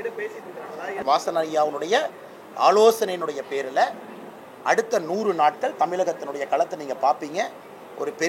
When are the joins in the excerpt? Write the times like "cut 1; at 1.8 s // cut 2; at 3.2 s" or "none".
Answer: cut 1; at 1.0 s